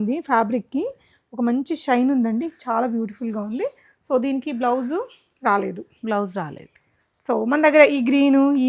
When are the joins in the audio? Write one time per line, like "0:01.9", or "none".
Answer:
none